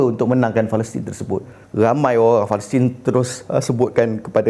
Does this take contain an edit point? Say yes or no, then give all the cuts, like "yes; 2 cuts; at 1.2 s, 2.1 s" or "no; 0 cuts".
yes; 1 cut; at 1.6 s